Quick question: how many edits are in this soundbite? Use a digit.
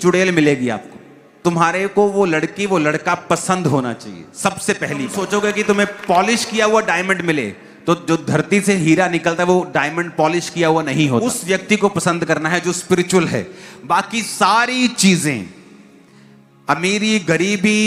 3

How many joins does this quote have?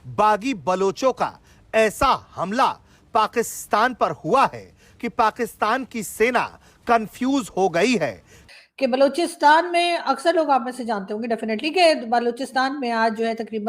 1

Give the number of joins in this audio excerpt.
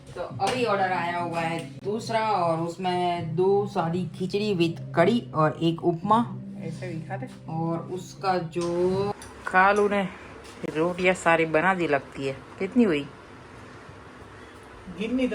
1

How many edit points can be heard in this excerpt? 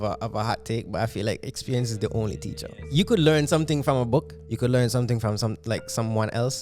2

